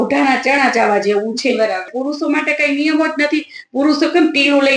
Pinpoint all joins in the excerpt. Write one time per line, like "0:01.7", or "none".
0:01.9